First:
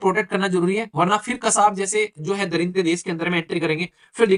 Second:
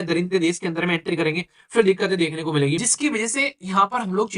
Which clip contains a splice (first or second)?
second